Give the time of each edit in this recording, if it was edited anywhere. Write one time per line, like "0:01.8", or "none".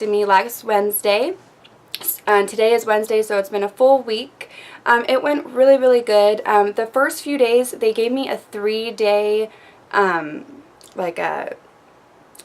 0:03.7

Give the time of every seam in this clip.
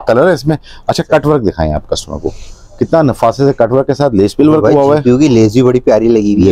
none

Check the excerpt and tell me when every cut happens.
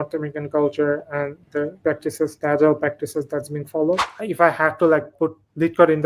0:02.0
0:04.2
0:05.1

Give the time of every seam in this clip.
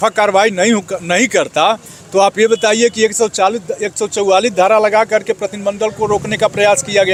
none

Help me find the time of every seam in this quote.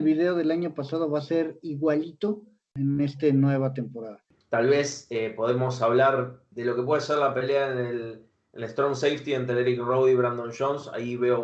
0:04.3

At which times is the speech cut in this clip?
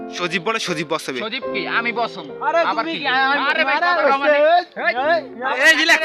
none

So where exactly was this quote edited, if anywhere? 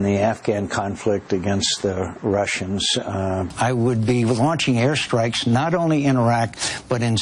0:03.5

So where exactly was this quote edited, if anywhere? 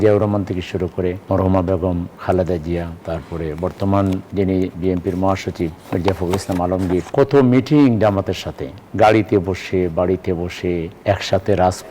0:01.2
0:02.1
0:03.0
0:04.3
0:05.8
0:07.1
0:10.9

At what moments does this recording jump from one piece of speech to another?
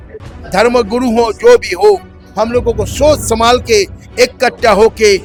none

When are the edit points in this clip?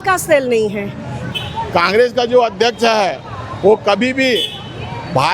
0:01.2

